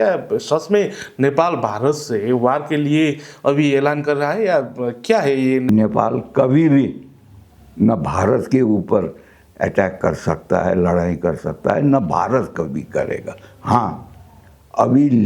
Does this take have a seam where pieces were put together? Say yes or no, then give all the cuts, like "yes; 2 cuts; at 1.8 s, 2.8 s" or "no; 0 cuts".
yes; 1 cut; at 5.7 s